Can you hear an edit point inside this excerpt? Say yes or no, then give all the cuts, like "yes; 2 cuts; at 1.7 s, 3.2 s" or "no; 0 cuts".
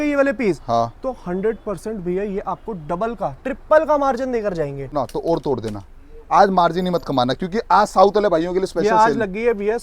yes; 1 cut; at 4.9 s